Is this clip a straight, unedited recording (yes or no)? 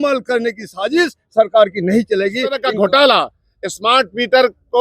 no